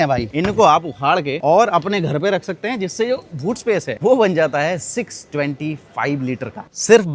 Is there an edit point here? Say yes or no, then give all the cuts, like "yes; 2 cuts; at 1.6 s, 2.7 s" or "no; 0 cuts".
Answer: no; 0 cuts